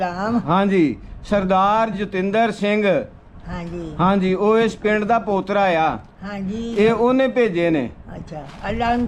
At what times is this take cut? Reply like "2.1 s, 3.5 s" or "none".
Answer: none